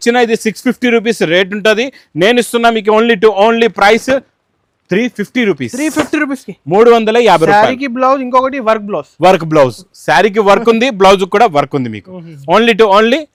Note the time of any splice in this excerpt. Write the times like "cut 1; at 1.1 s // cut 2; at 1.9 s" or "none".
none